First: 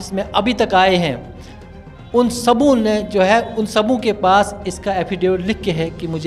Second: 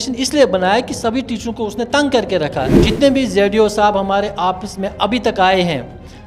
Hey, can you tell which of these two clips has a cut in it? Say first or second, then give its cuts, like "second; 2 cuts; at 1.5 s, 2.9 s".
second; 1 cut; at 2.8 s